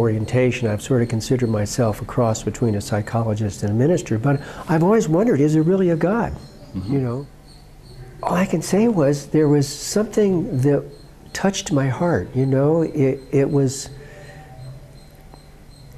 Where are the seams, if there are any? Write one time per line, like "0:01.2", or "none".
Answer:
0:07.3